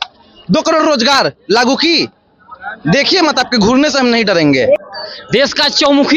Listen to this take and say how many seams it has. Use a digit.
1